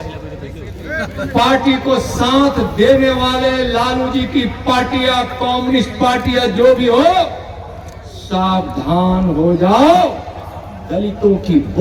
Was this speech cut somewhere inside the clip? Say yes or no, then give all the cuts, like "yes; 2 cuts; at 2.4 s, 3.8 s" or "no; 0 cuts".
no; 0 cuts